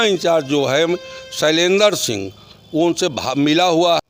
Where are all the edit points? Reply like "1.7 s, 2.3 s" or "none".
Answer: none